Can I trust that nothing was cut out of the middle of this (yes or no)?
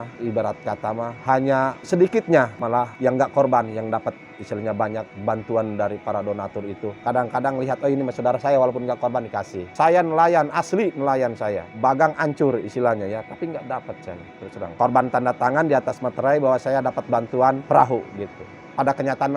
no